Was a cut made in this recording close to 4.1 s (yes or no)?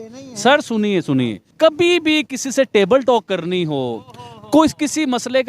no